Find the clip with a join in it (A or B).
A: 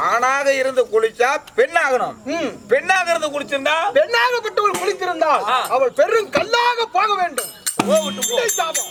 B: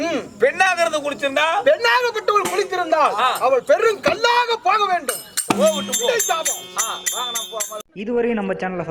B